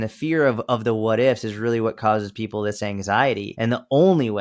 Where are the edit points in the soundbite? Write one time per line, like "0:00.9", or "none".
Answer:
0:03.5